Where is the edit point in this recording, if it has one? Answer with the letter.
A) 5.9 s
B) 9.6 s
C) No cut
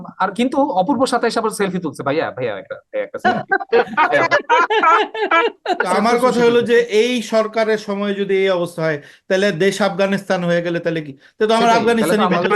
A